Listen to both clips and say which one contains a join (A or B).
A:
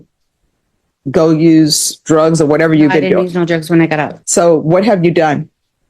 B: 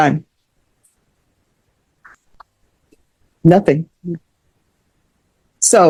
A